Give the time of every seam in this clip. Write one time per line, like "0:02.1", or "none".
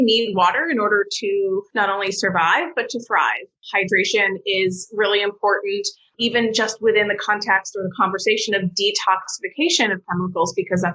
0:01.7

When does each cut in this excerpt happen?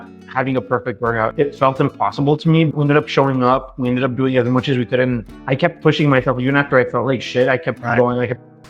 0:01.3
0:02.7
0:05.3

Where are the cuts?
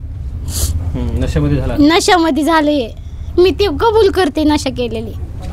none

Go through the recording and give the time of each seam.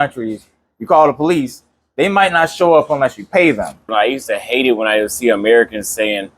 0:03.9

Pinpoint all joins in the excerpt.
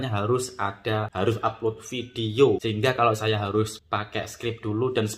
0:01.1
0:02.6
0:03.8

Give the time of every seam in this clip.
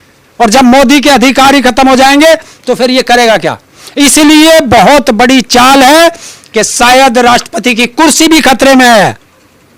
none

